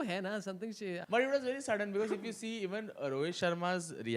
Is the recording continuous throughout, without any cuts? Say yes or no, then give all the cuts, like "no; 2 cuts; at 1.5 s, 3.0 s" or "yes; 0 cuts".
no; 1 cut; at 1.0 s